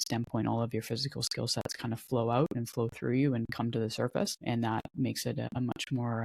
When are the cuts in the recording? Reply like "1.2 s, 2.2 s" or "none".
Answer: 4.4 s, 5.5 s